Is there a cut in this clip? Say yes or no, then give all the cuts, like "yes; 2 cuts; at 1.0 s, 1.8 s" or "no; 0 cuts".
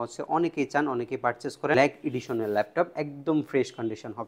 yes; 1 cut; at 1.7 s